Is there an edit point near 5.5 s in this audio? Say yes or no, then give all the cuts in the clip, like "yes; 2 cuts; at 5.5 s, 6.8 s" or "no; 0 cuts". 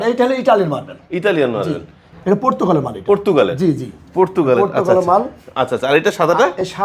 no; 1 cut; at 2.1 s